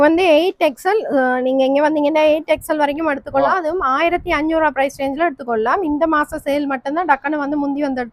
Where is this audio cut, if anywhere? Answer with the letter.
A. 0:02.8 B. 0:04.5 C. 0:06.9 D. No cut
D